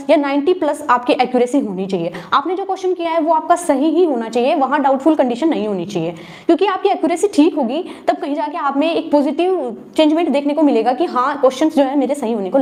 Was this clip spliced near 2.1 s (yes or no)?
no